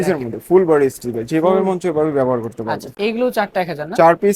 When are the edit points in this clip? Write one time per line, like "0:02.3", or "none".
0:03.0